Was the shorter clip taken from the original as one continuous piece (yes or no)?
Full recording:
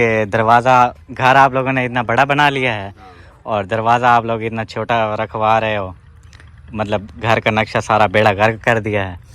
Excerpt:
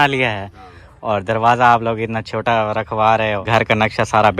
no